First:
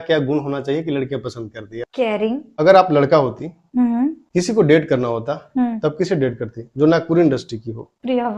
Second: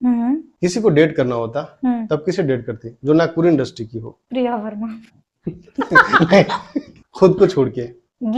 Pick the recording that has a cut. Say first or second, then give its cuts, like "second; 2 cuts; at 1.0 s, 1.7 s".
first; 1 cut; at 2.5 s